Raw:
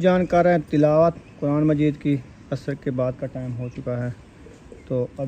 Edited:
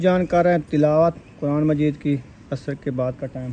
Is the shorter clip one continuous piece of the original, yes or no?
yes